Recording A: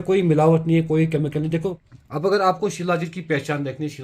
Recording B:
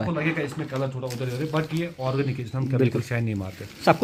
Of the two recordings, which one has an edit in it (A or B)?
A